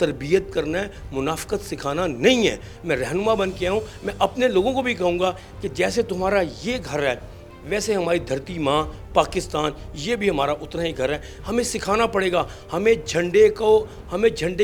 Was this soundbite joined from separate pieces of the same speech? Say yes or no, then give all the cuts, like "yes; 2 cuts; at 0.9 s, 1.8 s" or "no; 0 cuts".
no; 0 cuts